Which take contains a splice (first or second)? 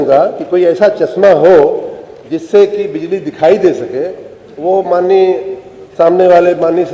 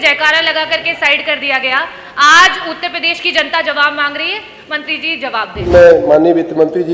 second